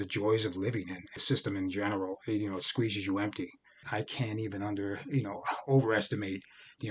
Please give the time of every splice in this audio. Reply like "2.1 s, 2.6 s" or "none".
1.2 s, 3.8 s

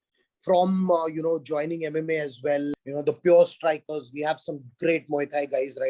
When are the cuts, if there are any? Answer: 2.7 s

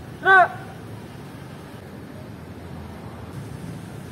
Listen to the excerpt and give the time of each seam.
1.8 s, 3.3 s

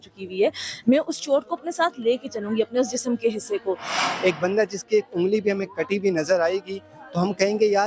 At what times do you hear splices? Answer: 4.0 s

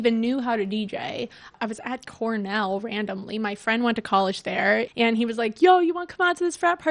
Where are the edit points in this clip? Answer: 1.5 s, 4.9 s

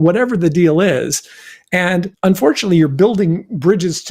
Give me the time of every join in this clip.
none

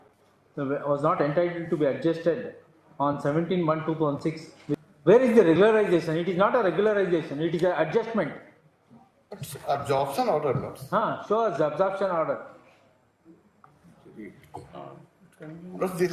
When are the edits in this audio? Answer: 4.8 s

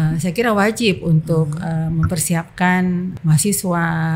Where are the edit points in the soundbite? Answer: 3.1 s

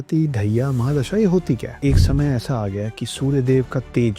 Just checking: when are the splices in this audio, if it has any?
1.8 s

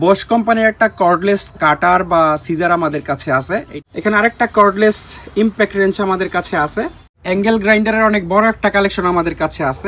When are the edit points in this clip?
3.7 s, 7.1 s

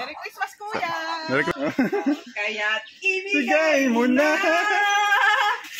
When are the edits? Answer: 1.5 s

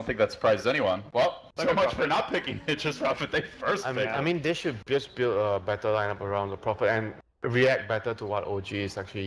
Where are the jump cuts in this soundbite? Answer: 6.8 s

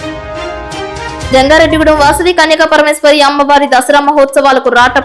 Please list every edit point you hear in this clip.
1.2 s

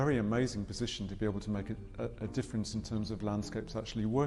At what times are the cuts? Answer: none

